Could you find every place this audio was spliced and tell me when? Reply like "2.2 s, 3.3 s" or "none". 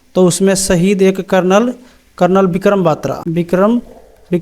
3.2 s

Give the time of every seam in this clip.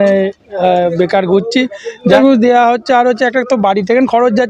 2.1 s

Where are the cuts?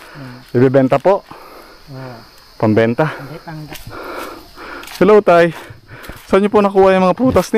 3.5 s

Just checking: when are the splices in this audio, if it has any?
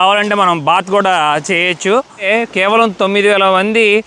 2.2 s

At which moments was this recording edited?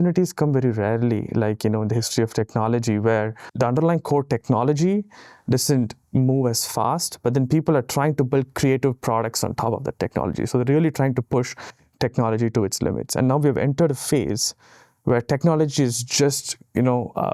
3.4 s

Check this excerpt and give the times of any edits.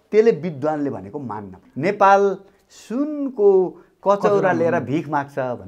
1.6 s

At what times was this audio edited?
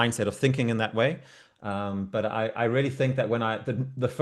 none

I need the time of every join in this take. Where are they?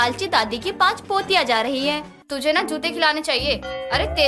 2.2 s

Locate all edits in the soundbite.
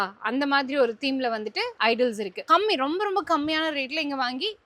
2.4 s

